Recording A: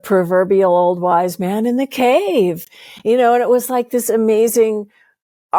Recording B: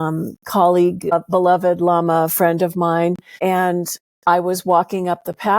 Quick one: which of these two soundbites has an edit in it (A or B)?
B